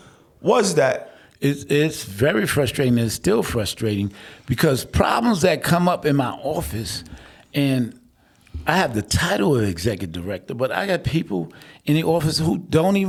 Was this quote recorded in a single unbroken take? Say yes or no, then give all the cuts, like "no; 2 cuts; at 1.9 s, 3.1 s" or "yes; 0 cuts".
yes; 0 cuts